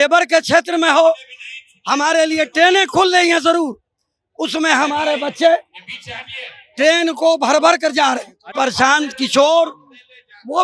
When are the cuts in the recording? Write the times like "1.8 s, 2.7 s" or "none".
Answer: 8.5 s